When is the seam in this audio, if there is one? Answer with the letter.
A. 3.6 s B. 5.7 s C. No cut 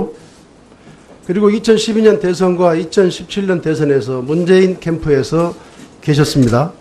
A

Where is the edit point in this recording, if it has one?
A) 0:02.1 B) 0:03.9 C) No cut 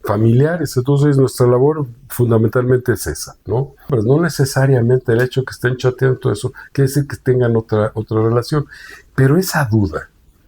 B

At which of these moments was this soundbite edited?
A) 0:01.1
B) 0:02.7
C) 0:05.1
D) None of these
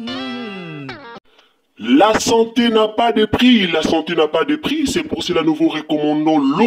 A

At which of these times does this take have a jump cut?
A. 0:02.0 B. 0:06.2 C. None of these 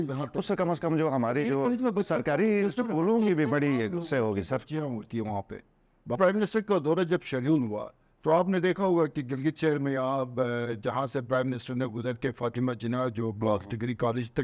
B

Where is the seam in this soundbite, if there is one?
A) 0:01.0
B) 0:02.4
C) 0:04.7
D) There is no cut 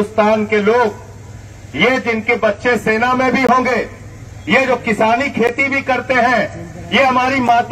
D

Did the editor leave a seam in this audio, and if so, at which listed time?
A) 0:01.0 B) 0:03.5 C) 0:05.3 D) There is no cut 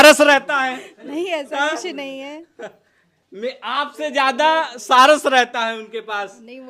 D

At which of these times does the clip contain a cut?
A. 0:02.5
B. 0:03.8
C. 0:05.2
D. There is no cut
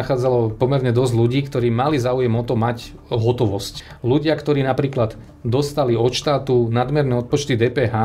B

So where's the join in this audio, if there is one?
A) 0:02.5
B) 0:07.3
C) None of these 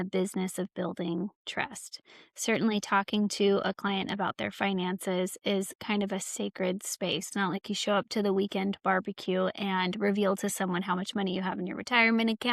B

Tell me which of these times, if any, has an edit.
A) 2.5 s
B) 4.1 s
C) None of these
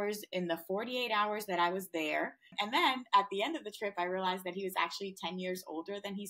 A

